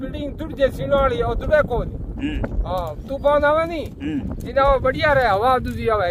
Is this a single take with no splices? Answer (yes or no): yes